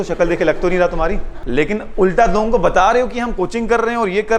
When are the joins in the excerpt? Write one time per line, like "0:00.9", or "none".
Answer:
none